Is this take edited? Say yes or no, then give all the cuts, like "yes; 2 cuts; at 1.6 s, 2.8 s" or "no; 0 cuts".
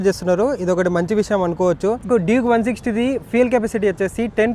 yes; 1 cut; at 2.1 s